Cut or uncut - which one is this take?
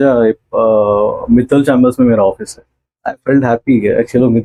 uncut